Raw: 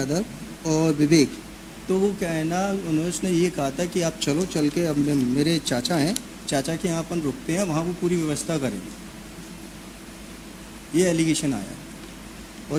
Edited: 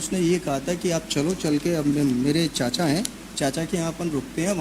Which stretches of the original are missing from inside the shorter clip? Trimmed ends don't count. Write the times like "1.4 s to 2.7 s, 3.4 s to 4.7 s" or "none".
none